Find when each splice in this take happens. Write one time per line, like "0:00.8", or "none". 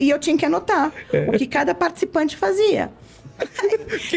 none